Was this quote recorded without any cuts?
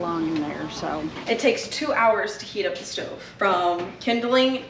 no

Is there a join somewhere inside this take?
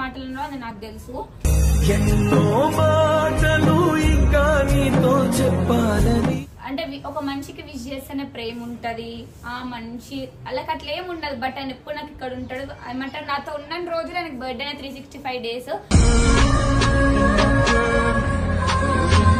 no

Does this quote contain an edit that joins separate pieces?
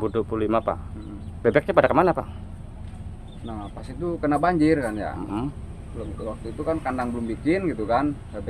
no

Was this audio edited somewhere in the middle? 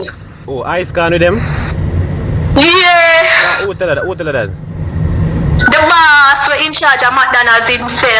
no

